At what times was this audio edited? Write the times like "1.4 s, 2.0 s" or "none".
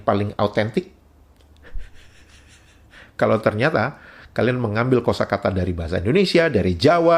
none